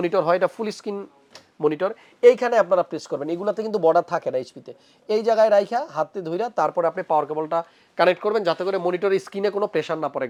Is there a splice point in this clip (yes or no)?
no